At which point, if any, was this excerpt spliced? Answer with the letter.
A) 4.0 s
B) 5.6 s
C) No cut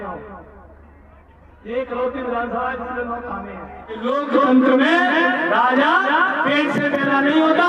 A